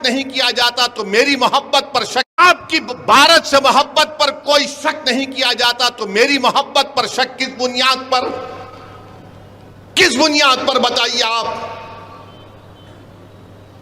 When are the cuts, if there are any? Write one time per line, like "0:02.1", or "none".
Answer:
0:02.4